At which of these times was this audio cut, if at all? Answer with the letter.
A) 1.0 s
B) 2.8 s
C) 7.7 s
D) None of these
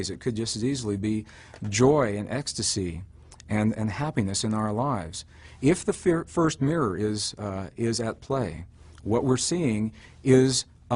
B